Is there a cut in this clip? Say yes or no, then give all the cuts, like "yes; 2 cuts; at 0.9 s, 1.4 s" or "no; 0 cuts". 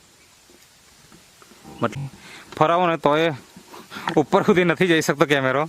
yes; 1 cut; at 2.0 s